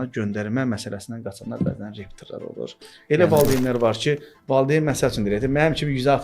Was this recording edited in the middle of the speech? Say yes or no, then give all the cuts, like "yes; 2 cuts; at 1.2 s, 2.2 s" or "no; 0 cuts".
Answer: yes; 1 cut; at 2.9 s